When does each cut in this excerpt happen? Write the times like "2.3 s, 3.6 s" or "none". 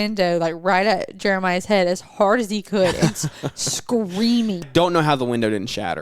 4.7 s